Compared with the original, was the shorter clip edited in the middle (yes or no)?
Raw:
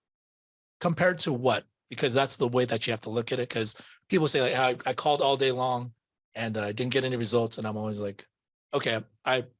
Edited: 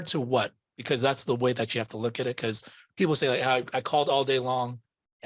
no